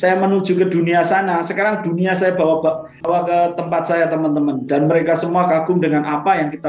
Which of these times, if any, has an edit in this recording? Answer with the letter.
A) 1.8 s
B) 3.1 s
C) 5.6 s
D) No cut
B